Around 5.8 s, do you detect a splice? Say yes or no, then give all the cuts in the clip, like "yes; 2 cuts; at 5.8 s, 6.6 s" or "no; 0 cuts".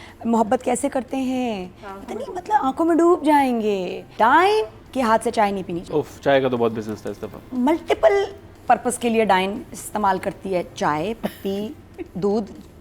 yes; 3 cuts; at 4.0 s, 4.8 s, 5.8 s